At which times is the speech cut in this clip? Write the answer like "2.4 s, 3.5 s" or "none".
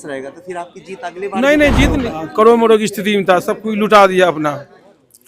2.2 s

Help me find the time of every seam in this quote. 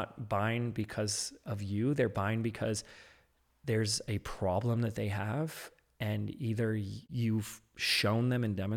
7.0 s

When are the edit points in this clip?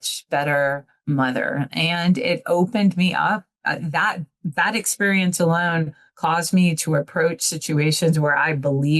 0.9 s

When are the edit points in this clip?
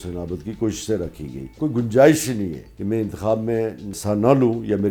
1.5 s, 2.7 s, 3.9 s

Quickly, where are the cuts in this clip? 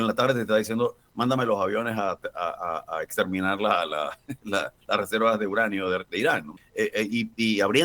6.6 s

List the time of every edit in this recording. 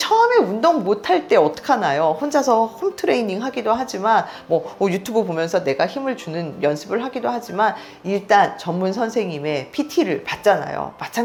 none

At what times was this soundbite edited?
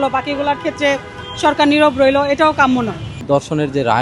3.1 s

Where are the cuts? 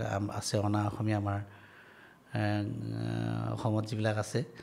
none

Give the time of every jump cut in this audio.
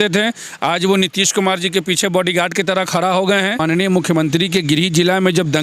3.6 s

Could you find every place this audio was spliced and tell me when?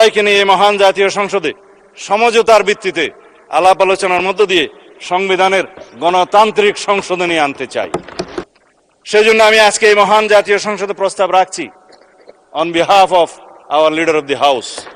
8.4 s

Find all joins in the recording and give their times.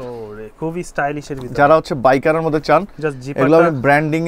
none

